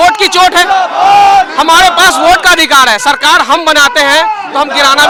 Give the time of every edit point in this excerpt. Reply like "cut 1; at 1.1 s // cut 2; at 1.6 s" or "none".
none